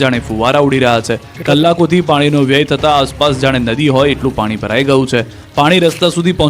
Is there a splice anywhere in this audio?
yes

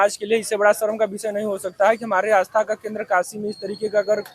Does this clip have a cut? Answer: no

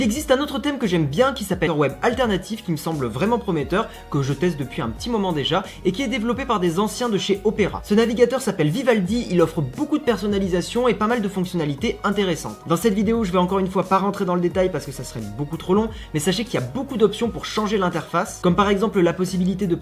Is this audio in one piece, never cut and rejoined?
yes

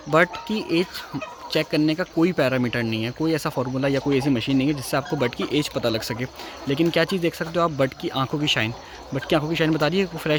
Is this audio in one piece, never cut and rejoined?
yes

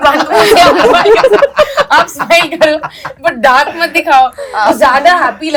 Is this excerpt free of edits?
yes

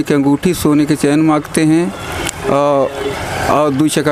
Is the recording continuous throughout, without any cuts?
yes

